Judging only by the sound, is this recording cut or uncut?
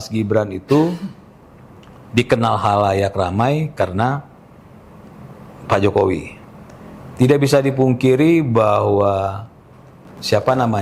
uncut